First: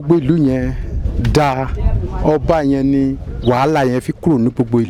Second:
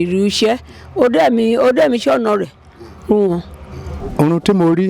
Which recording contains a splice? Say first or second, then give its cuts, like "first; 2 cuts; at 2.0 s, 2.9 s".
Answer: second; 1 cut; at 4.0 s